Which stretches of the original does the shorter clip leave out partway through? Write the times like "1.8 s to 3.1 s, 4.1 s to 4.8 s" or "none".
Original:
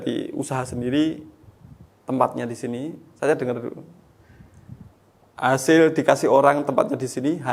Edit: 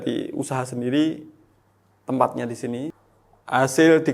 3.0 s to 4.9 s